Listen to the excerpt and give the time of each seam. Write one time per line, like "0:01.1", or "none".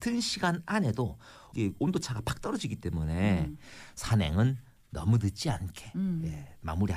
0:01.4